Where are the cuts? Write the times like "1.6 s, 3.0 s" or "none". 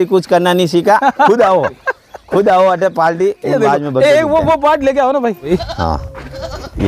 5.5 s

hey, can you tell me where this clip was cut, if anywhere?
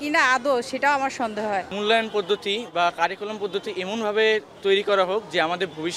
1.7 s

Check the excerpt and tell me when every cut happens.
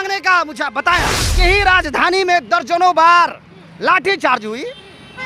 1.3 s

